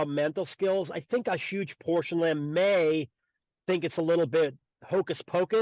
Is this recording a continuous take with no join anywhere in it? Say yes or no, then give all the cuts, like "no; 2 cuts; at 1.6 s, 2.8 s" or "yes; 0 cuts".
no; 1 cut; at 4.6 s